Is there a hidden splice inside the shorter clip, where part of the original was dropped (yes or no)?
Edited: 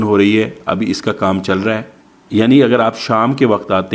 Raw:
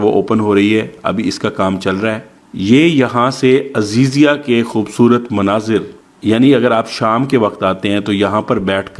yes